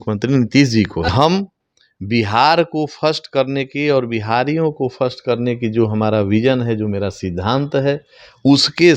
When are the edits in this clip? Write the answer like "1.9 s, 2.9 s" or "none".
1.1 s